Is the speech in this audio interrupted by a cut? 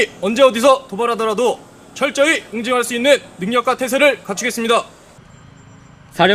yes; 1 cut; at 5.0 s

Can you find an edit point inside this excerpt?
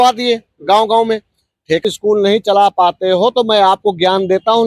yes; 1 cut; at 1.8 s

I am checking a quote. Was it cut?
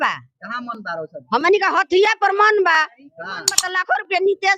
yes; 1 cut; at 3.6 s

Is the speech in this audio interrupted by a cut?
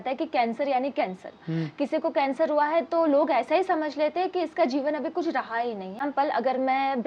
yes; 1 cut; at 6.0 s

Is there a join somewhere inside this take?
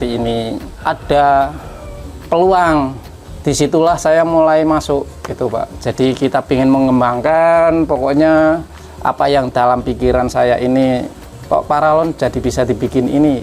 no; 0 cuts

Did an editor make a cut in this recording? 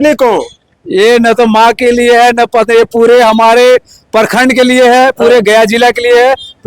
no; 0 cuts

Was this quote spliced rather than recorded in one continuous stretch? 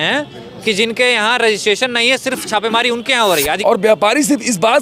yes; 1 cut; at 3.6 s

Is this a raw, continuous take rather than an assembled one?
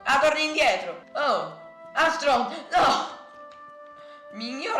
no; 1 cut; at 1.0 s

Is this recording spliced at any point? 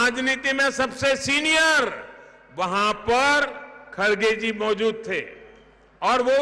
no; 0 cuts

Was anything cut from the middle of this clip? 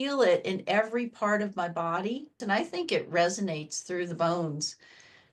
yes; 1 cut; at 2.4 s

